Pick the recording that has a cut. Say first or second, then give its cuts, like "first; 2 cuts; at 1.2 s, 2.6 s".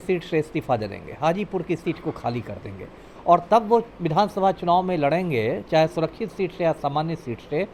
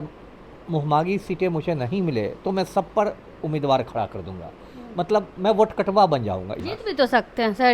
second; 1 cut; at 6.5 s